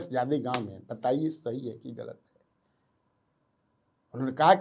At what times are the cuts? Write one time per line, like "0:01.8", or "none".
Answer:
none